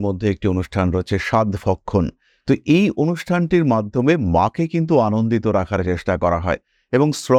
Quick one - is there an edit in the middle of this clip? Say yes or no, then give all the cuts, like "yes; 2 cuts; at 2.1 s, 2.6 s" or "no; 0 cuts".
no; 0 cuts